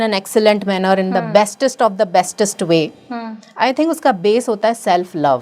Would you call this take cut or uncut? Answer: uncut